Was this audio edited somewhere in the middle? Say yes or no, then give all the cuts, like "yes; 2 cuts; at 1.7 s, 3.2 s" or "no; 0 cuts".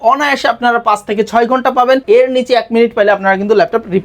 yes; 1 cut; at 2.0 s